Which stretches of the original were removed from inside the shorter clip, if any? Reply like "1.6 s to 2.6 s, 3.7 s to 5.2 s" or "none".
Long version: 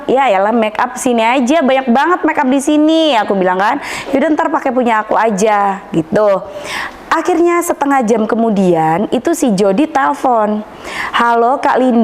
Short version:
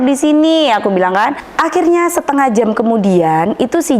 3.9 s to 7.0 s